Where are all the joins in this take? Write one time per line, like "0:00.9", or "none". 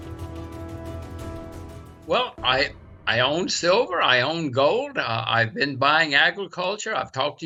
none